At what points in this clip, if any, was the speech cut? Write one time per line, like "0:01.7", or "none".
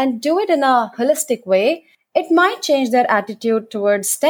0:01.9